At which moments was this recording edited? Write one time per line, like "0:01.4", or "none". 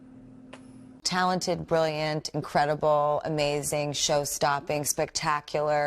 0:01.0